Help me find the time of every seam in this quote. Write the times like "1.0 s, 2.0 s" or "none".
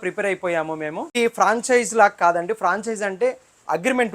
1.2 s